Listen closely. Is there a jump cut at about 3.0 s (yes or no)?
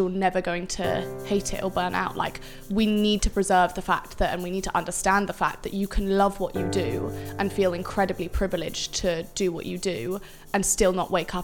no